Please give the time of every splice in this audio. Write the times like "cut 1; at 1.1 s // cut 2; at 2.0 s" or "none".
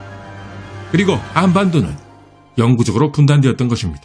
cut 1; at 0.9 s